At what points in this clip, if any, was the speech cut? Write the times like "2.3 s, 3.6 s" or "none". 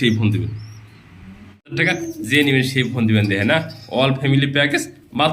1.7 s